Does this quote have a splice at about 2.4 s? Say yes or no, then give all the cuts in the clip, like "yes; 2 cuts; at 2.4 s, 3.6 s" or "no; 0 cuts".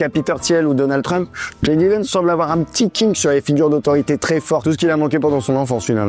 no; 1 cut; at 4.6 s